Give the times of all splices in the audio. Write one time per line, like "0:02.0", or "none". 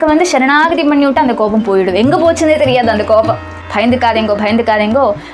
0:03.6